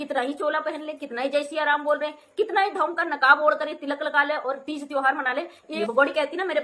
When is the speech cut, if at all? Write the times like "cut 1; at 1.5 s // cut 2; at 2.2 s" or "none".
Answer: cut 1; at 5.7 s